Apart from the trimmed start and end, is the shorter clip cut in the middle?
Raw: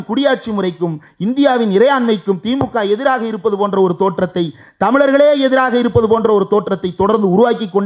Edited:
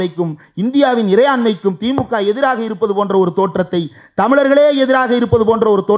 no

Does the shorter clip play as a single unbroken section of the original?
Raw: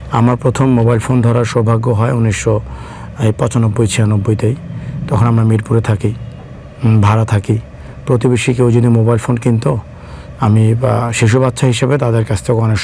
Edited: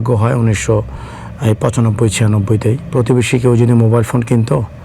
no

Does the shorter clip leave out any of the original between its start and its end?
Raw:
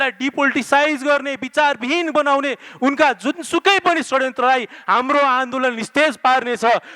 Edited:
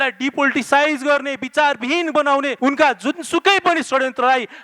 yes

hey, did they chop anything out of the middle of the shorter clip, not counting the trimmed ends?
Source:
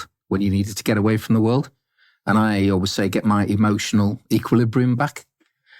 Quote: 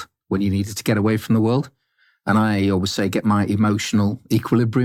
no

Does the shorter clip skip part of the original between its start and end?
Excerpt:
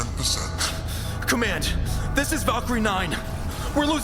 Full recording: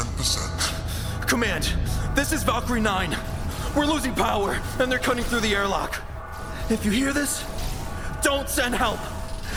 no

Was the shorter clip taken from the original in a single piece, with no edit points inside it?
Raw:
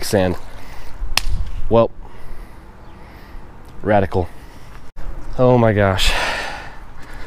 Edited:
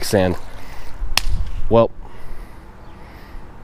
yes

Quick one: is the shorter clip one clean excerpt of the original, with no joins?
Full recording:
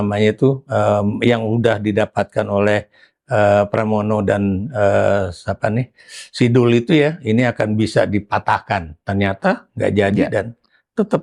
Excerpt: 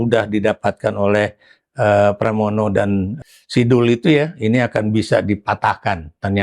no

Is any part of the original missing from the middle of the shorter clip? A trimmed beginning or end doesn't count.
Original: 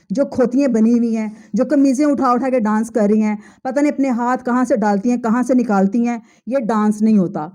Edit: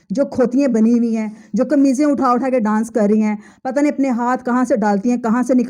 no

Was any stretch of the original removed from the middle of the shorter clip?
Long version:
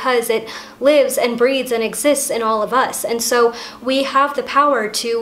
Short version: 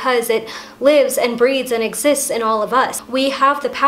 yes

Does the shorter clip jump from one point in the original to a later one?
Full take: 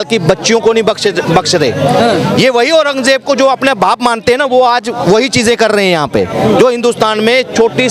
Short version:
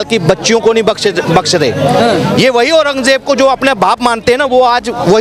no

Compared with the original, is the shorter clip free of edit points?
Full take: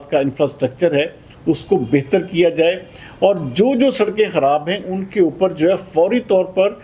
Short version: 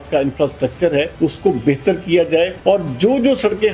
no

